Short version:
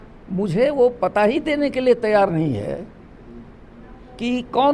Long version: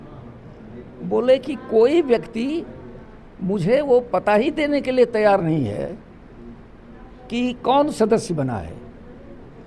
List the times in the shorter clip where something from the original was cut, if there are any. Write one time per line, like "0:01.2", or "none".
none